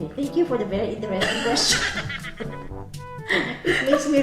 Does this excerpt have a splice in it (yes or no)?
no